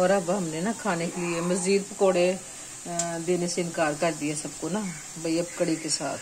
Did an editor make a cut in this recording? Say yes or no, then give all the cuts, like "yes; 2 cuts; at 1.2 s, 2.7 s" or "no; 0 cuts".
no; 0 cuts